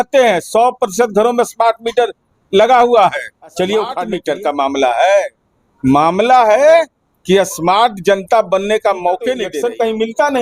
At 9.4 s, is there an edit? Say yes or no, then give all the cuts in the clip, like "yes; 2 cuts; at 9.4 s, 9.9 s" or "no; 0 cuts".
yes; 2 cuts; at 4.1 s, 9.4 s